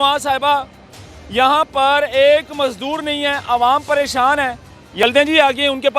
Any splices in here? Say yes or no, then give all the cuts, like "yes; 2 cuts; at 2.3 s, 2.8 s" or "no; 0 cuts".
yes; 1 cut; at 4.8 s